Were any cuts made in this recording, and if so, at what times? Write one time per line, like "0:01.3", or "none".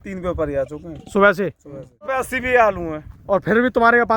0:02.1

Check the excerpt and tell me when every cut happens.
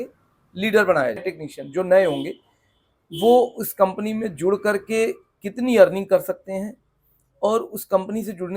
0:01.4

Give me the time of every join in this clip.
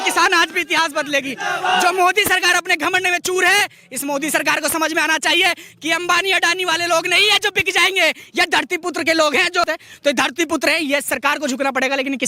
0:09.7

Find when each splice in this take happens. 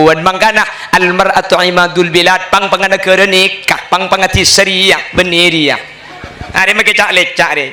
none

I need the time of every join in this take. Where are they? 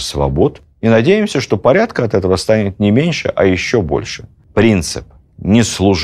0:04.3

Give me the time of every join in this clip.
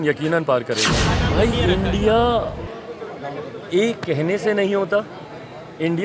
0:01.2

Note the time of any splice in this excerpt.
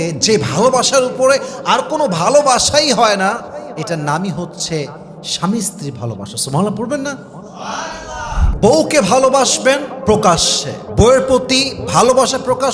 0:08.4

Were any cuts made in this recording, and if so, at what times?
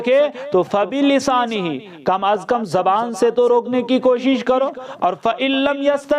none

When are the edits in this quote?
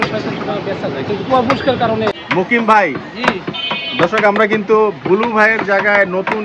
0:02.2

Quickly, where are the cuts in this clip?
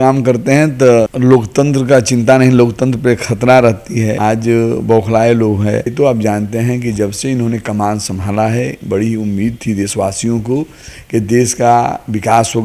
0:01.1
0:04.2
0:05.9

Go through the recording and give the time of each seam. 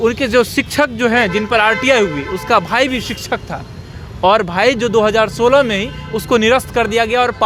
none

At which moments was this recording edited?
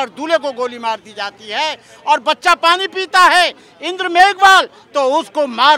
none

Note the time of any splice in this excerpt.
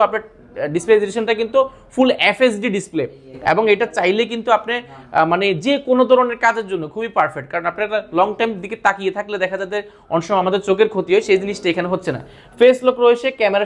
none

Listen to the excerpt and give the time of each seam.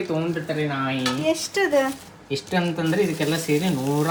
none

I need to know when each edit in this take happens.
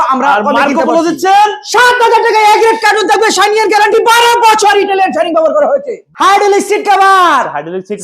0:06.0

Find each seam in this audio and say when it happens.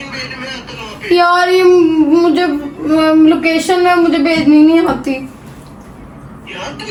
none

